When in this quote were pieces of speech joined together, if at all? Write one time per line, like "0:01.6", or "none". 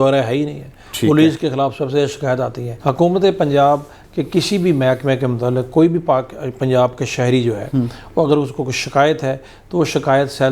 0:02.8

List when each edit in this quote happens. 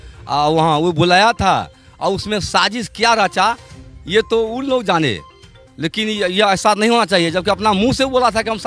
none

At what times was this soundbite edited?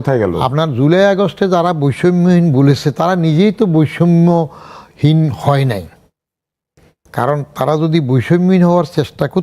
none

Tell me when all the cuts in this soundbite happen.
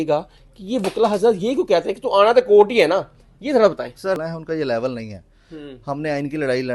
0:04.2

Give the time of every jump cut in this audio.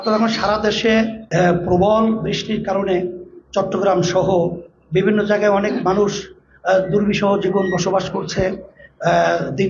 0:01.2

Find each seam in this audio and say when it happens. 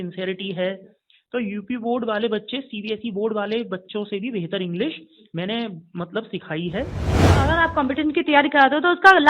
0:07.1

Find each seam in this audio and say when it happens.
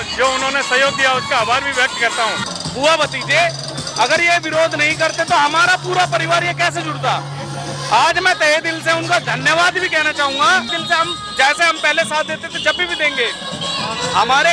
0:02.5
0:10.7

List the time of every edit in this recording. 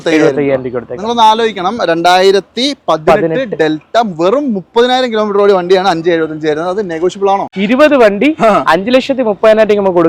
0:07.5

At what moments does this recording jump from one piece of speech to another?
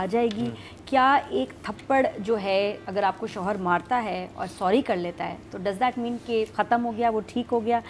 0:02.8
0:06.5

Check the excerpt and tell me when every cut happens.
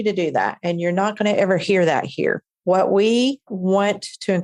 0:03.5

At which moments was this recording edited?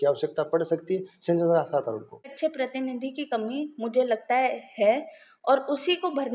0:02.3

